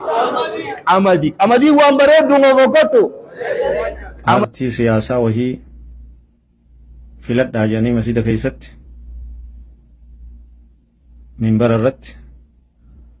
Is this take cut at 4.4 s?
yes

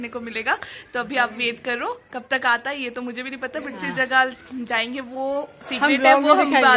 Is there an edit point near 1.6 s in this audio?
no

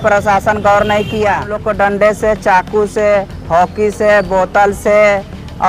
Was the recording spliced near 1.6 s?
yes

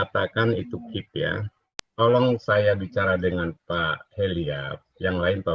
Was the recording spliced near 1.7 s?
yes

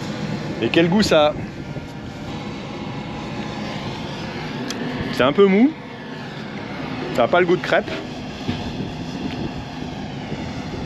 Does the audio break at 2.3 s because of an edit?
yes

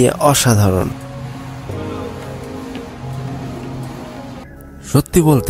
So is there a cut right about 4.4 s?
yes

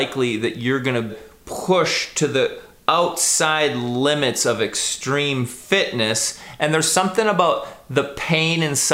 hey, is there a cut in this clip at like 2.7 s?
no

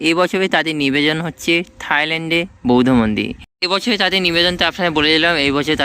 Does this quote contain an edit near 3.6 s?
yes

